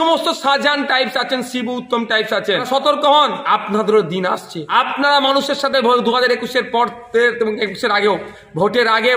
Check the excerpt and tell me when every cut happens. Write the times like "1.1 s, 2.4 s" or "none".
2.6 s, 3.4 s, 4.5 s